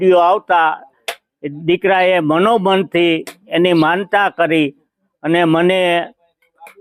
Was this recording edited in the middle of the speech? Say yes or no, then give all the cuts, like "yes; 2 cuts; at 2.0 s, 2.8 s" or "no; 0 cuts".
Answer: no; 0 cuts